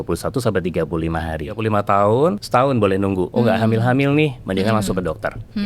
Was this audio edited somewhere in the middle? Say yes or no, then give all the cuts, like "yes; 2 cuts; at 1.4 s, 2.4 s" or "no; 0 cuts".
yes; 3 cuts; at 1.6 s, 2.4 s, 3.3 s